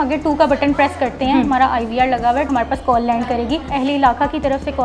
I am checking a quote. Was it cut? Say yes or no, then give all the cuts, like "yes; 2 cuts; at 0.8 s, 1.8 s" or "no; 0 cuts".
yes; 2 cuts; at 2.5 s, 3.7 s